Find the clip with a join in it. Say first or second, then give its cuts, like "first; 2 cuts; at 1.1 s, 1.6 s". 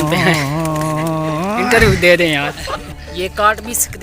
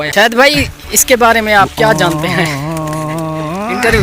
first; 1 cut; at 2.9 s